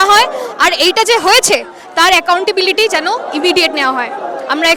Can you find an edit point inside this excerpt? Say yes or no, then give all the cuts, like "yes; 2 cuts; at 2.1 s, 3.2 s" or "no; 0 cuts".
no; 0 cuts